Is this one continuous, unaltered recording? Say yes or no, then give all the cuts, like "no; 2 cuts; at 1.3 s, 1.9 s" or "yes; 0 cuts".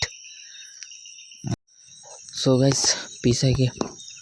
no; 1 cut; at 1.5 s